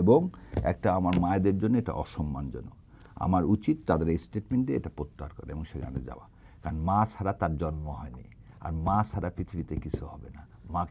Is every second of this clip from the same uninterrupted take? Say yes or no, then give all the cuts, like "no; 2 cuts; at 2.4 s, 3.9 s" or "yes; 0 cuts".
yes; 0 cuts